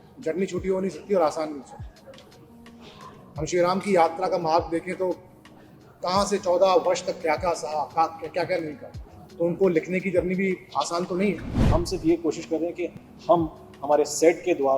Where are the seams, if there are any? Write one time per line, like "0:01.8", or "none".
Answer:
0:11.6